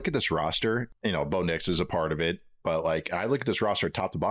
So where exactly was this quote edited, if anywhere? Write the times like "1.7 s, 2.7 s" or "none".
0.9 s